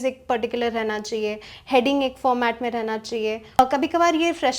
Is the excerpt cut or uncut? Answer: cut